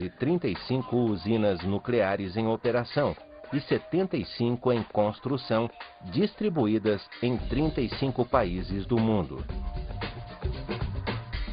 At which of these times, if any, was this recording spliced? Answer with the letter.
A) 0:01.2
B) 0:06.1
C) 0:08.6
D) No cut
D